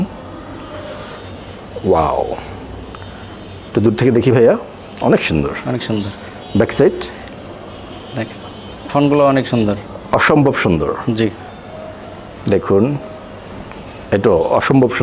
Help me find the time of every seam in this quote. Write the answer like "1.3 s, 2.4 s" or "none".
11.5 s